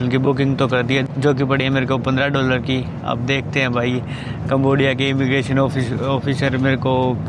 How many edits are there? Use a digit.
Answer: 0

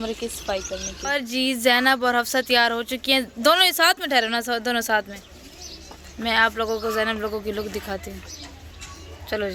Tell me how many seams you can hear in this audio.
0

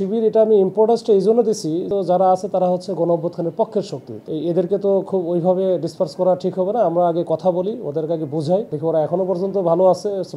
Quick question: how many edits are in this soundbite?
2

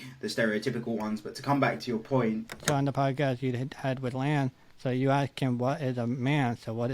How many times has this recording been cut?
1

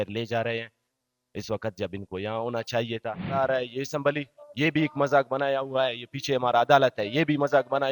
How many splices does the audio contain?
1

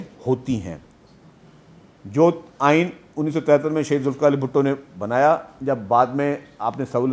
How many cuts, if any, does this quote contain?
0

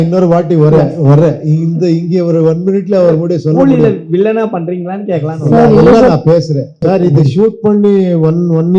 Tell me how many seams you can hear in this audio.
1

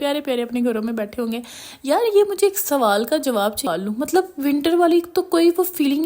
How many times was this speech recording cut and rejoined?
1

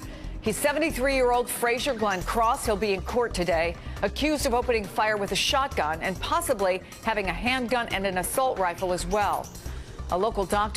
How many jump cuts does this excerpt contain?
1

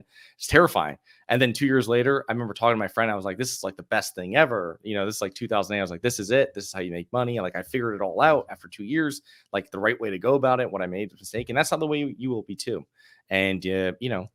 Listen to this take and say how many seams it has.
0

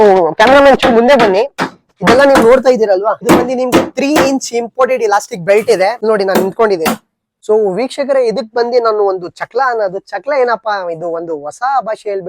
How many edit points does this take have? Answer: 3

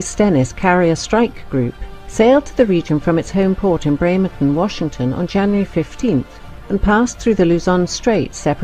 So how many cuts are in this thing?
1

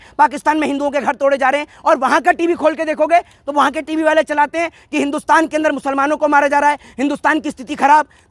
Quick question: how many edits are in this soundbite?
0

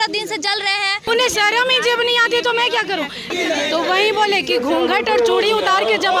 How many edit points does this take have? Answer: 2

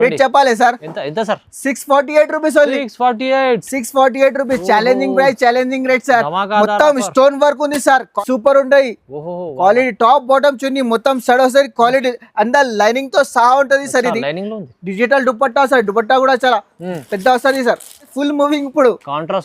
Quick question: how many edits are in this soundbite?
2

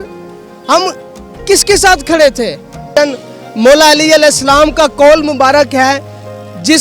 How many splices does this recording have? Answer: 1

